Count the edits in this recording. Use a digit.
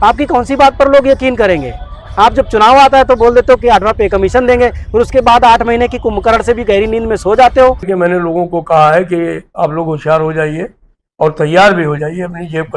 1